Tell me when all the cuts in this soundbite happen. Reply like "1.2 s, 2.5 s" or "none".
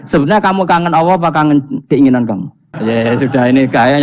2.7 s